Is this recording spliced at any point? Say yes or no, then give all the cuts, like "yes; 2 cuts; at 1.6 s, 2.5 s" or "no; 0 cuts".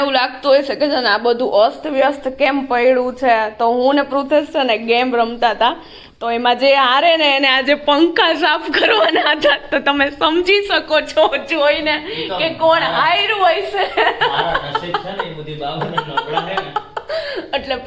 no; 0 cuts